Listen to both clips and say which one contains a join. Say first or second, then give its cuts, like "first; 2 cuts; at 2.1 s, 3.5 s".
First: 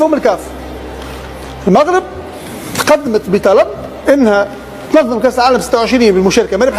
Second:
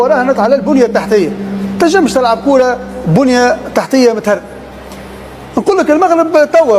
second; 1 cut; at 5.6 s